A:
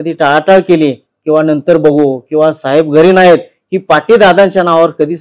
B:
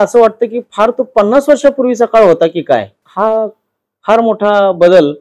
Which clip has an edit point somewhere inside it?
B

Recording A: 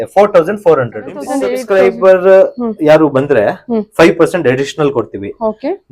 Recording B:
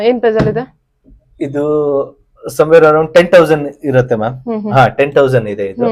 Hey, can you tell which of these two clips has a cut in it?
A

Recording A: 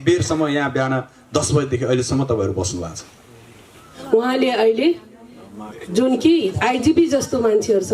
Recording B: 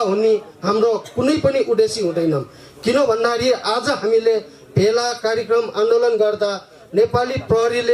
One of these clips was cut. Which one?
A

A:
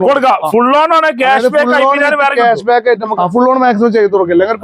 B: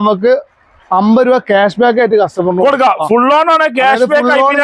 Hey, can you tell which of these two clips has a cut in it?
A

